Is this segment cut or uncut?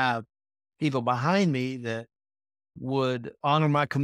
uncut